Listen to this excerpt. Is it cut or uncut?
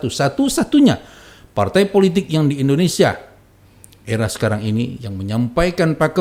uncut